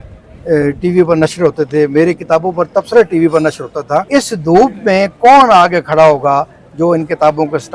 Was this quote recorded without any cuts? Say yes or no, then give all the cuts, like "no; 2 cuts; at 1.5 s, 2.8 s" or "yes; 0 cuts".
no; 1 cut; at 4.1 s